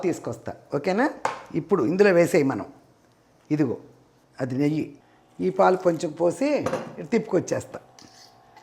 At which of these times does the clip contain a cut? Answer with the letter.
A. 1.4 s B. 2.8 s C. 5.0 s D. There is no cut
C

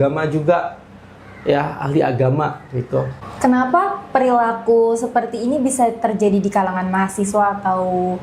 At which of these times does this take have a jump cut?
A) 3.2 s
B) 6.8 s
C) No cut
A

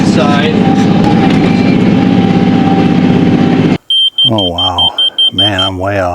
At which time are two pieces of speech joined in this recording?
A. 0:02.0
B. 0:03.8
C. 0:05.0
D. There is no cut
B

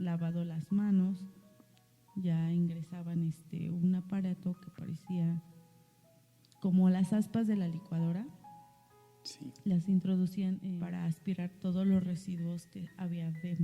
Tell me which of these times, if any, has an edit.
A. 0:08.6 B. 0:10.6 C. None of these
B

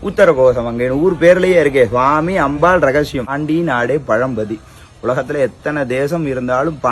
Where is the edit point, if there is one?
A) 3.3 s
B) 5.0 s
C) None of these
A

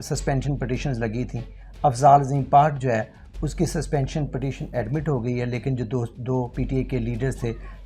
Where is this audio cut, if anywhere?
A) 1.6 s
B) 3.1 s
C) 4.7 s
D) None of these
D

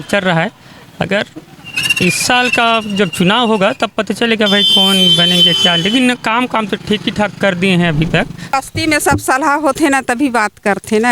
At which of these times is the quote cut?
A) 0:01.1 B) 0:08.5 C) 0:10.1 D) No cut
B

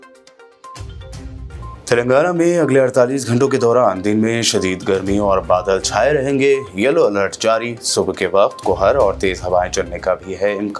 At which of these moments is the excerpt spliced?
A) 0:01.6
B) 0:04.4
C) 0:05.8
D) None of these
A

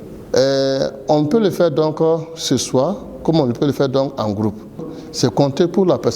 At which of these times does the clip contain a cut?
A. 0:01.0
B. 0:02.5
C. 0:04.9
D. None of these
C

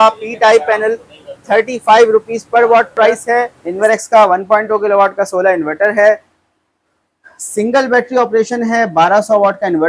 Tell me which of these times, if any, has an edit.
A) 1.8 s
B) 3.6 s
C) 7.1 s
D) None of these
B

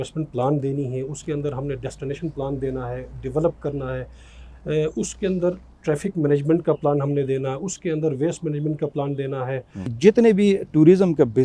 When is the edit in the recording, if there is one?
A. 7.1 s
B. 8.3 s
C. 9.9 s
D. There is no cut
C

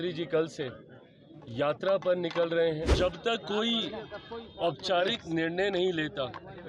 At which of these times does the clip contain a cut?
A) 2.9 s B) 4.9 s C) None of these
A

